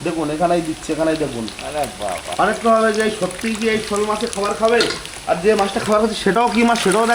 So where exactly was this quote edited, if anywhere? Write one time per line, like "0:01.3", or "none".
none